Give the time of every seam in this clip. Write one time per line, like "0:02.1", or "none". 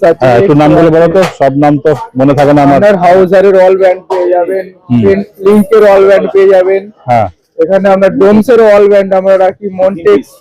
none